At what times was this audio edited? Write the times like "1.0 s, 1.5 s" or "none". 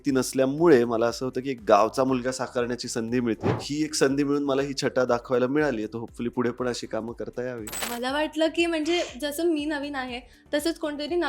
3.7 s, 7.9 s